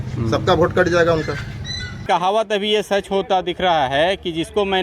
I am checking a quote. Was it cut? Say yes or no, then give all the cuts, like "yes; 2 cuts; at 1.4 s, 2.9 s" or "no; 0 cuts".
yes; 1 cut; at 2.0 s